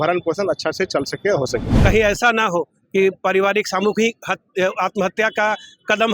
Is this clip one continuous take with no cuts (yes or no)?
no